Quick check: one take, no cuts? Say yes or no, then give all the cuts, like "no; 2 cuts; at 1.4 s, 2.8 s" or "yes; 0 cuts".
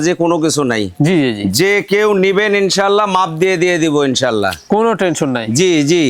yes; 0 cuts